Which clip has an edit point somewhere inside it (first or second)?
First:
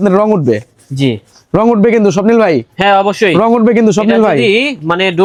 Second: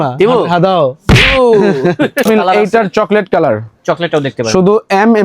second